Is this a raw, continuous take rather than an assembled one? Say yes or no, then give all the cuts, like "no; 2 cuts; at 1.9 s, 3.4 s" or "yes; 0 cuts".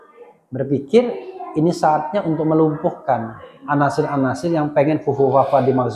yes; 0 cuts